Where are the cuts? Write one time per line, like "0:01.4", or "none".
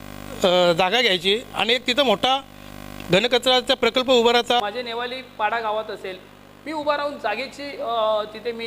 0:04.6